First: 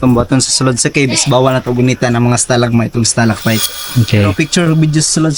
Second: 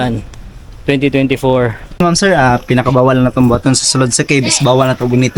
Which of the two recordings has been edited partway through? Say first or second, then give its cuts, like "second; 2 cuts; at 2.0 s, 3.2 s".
second; 1 cut; at 1.8 s